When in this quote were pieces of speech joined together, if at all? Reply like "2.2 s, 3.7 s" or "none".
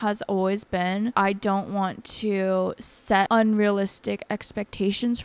1.1 s, 3.3 s

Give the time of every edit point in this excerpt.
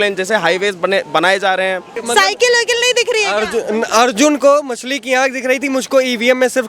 1.9 s

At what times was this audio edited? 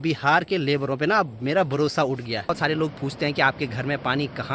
2.5 s

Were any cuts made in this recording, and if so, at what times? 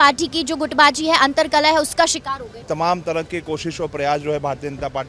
2.6 s

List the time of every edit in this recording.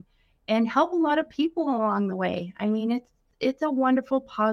3.3 s

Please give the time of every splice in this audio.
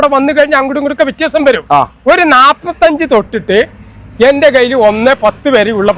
none

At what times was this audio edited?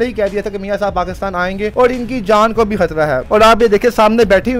1.7 s, 3.2 s

